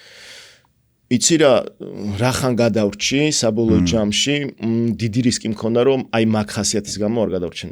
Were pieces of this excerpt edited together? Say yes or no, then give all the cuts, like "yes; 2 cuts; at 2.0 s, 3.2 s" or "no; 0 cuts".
no; 0 cuts